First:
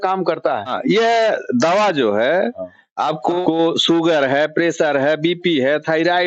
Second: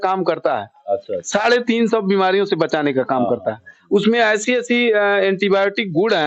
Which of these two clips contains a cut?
first; 2 cuts; at 0.8 s, 3.4 s

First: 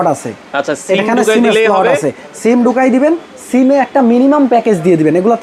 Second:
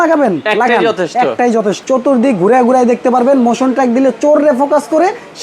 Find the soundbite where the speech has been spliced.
second; 1 cut; at 1.8 s

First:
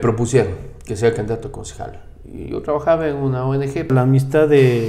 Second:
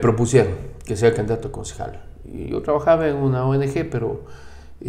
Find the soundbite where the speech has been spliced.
first; 1 cut; at 3.9 s

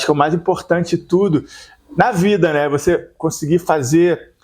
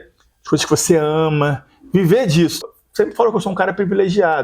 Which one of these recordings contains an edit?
second; 1 cut; at 2.6 s

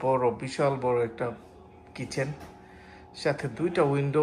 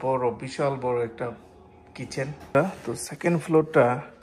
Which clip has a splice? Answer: second; 1 cut; at 2.6 s

